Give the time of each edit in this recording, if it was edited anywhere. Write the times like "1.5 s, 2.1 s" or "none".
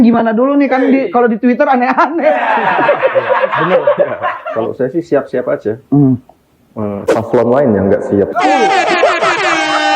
4.8 s

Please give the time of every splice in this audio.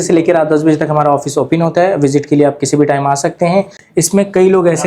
3.8 s

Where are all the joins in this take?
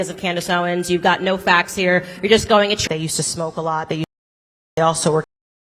2.8 s

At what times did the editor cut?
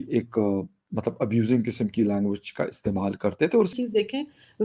3.7 s

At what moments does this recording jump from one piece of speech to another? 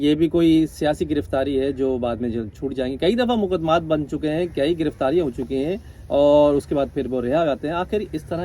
none

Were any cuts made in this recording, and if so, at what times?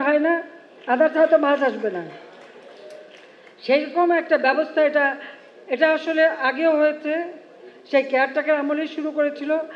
none

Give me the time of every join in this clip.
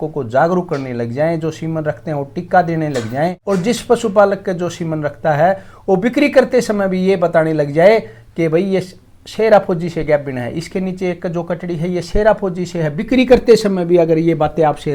none

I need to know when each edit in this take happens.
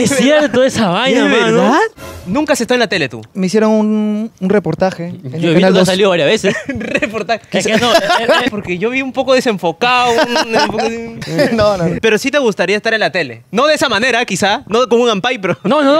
2.2 s, 3.3 s, 8.5 s, 11.1 s, 12.0 s

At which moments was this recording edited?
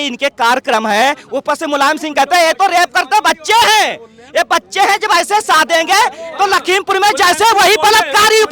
none

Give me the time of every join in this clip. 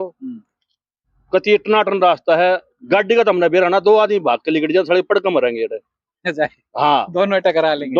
none

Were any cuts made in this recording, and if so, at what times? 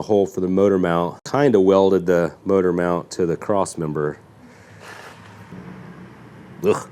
1.2 s, 5.5 s

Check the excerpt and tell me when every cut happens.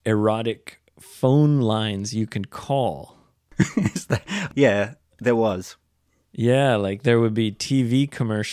3.5 s

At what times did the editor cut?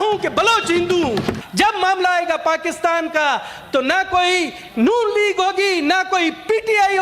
1.4 s

